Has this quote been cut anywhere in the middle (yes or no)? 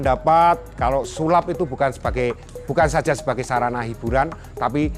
no